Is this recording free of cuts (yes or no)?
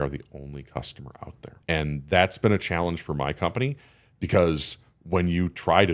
no